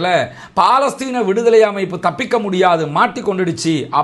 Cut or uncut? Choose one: uncut